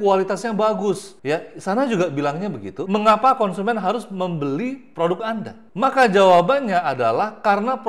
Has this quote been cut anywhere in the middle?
yes; 2 cuts; at 1.1 s, 5.6 s

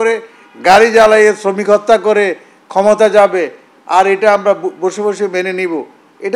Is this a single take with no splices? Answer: yes; 0 cuts

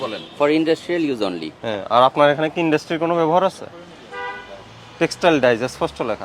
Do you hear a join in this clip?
no; 0 cuts

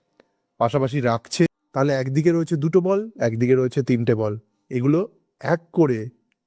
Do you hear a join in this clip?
yes; 1 cut; at 1.5 s

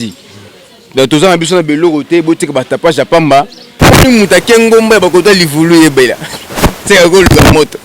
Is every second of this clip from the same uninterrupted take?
no; 1 cut; at 3.7 s

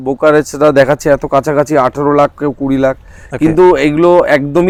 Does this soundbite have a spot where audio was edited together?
no; 0 cuts

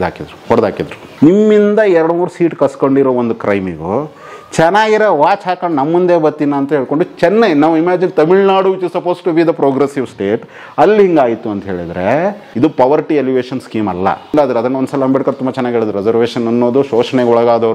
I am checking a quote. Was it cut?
yes; 3 cuts; at 1.0 s, 12.4 s, 14.3 s

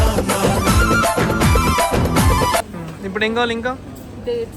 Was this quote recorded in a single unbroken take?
no; 1 cut; at 2.6 s

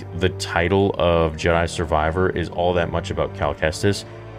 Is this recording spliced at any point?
no; 0 cuts

